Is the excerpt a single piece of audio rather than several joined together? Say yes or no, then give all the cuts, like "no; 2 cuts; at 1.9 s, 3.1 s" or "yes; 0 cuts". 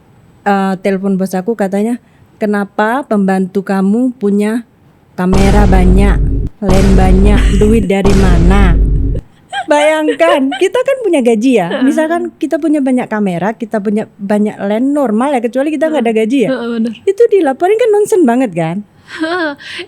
yes; 0 cuts